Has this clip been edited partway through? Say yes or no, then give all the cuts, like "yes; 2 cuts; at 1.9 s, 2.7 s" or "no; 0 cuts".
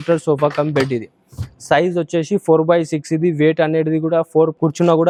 no; 0 cuts